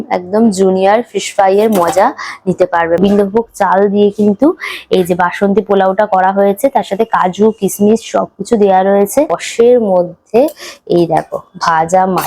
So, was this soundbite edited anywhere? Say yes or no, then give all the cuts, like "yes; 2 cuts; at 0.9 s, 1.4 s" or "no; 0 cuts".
yes; 2 cuts; at 3.0 s, 9.4 s